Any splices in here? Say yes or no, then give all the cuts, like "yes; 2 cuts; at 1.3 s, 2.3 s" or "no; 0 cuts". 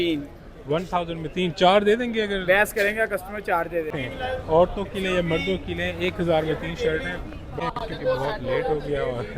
yes; 2 cuts; at 3.9 s, 7.6 s